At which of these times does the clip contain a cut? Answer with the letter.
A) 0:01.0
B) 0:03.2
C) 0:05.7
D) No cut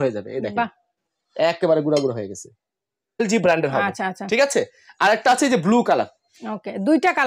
B